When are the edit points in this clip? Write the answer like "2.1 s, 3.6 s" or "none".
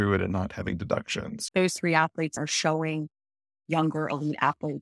1.3 s, 2.4 s